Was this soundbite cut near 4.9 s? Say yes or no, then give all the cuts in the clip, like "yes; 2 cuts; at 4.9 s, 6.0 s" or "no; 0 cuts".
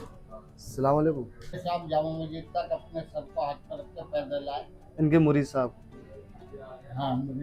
no; 1 cut; at 1.6 s